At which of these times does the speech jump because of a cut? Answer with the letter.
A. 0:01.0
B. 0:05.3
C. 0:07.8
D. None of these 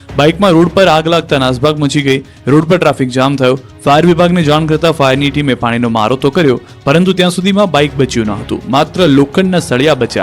B